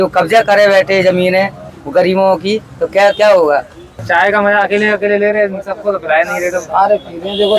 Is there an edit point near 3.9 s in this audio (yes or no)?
yes